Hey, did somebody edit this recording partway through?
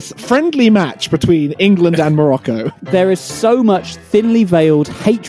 yes; 1 cut; at 2.8 s

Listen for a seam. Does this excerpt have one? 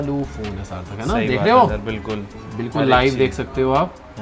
no; 0 cuts

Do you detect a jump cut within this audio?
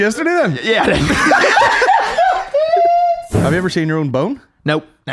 yes; 1 cut; at 3.4 s

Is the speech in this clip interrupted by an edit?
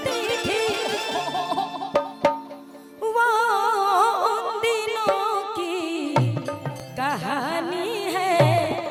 no; 0 cuts

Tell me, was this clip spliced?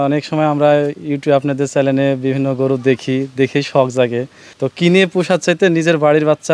yes; 1 cut; at 4.4 s

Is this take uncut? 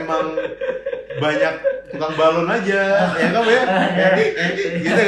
yes; 0 cuts

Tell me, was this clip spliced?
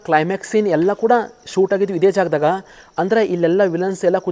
no; 0 cuts

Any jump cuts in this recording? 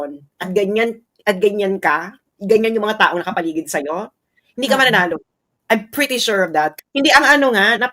yes; 1 cut; at 6.8 s

